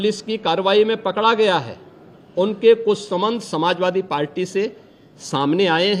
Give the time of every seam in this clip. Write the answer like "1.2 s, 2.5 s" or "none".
none